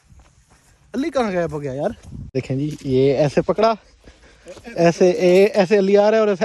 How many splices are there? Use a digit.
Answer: 1